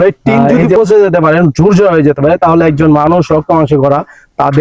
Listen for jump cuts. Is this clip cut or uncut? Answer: uncut